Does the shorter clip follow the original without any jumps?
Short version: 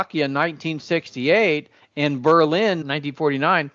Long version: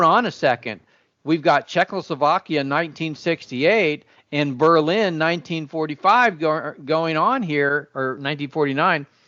no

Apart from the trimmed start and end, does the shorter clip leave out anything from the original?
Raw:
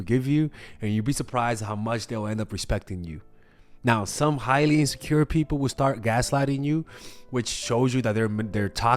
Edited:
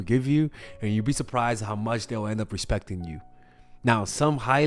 no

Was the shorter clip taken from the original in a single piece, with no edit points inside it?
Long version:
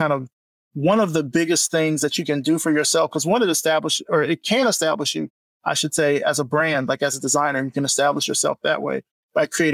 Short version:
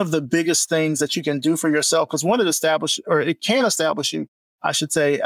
yes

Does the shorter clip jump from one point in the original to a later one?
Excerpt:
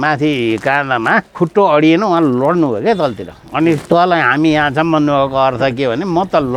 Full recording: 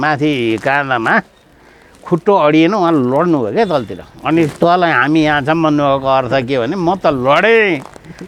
yes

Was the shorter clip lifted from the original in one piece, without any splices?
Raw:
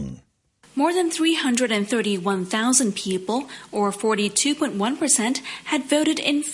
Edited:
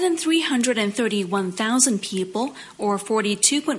yes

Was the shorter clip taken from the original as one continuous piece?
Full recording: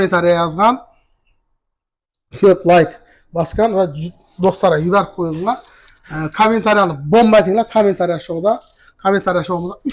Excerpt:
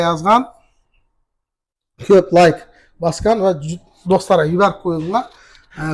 yes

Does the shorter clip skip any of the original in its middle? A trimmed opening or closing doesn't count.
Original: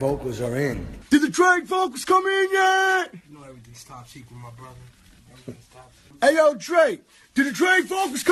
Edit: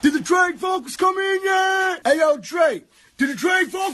yes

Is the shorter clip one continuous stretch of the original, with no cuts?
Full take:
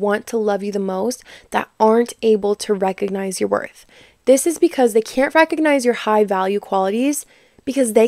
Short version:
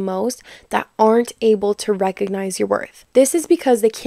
no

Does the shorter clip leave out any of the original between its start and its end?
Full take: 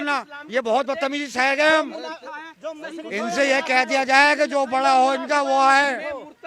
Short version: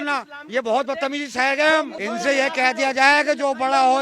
yes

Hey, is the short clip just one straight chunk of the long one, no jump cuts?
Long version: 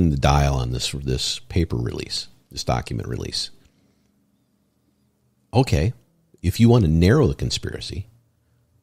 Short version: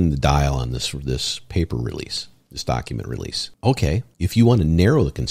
no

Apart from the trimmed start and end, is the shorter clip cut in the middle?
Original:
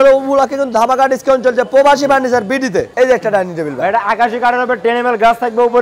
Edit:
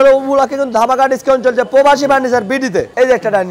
no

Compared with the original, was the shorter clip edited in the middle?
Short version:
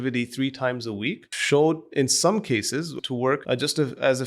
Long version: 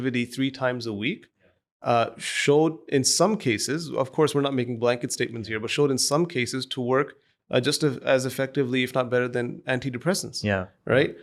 yes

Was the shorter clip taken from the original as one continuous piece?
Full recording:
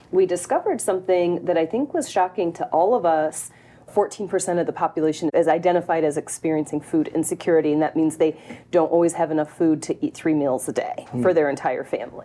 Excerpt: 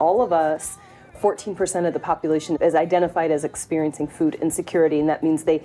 yes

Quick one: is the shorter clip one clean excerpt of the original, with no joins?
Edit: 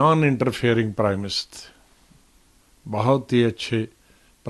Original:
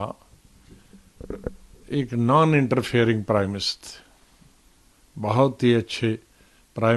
yes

